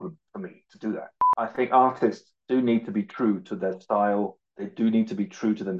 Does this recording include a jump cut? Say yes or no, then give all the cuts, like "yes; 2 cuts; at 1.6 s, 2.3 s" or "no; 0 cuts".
yes; 1 cut; at 1.2 s